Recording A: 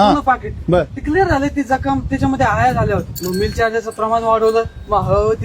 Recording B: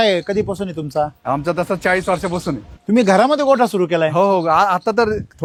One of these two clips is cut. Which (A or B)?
A